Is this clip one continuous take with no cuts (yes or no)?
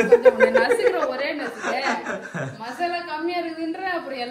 yes